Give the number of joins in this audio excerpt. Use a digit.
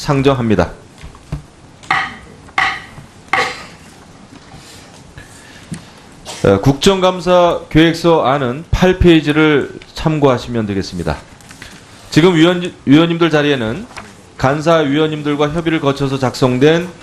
1